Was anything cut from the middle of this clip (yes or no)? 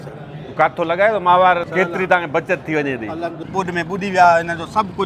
yes